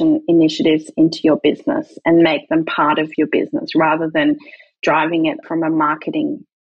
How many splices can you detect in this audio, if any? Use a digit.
2